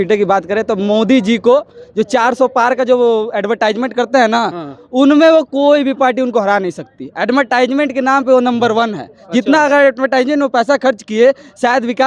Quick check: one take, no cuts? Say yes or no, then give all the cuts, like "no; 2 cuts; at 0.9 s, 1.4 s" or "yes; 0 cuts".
yes; 0 cuts